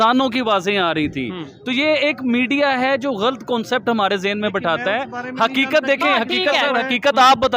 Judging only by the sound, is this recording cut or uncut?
uncut